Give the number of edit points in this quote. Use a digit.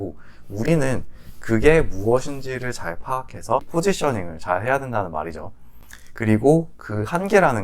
1